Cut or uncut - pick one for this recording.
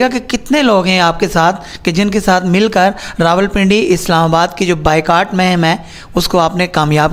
uncut